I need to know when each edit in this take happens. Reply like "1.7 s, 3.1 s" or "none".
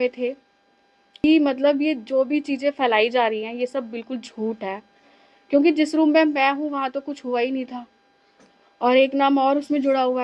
1.2 s